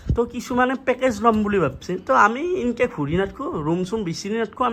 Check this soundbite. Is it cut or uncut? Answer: uncut